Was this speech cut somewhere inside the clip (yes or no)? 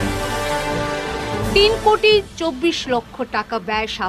yes